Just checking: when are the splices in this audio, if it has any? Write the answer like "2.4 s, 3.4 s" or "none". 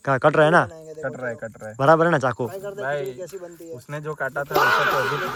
none

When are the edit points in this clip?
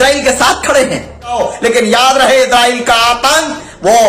1.4 s

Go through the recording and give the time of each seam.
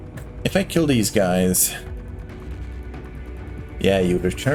none

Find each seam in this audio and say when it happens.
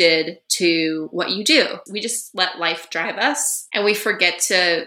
1.8 s

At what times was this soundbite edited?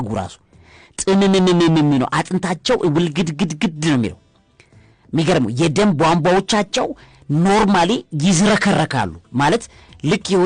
none

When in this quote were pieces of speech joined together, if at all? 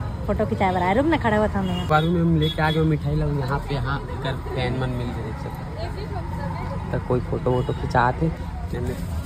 none

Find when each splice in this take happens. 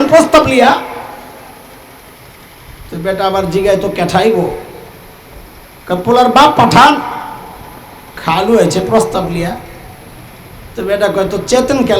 none

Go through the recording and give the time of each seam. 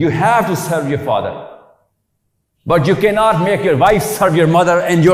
none

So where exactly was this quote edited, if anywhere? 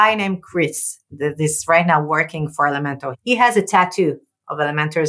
3.1 s

